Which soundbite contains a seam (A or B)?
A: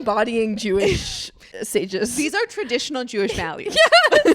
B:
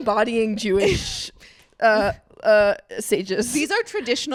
A